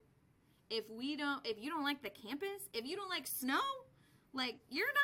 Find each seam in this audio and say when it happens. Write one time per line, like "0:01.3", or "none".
none